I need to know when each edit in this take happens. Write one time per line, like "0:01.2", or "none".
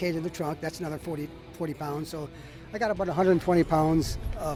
none